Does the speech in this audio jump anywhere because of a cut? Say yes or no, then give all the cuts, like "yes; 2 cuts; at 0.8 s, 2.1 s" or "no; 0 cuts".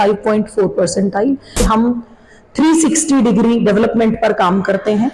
yes; 1 cut; at 1.6 s